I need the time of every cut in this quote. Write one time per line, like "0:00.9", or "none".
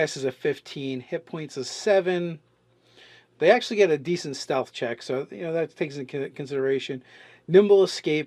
0:03.4